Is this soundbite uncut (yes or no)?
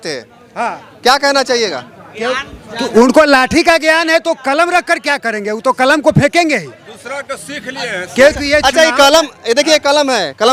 yes